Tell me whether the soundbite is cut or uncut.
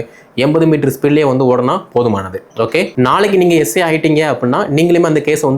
cut